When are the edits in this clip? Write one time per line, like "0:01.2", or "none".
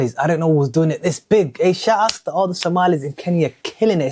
none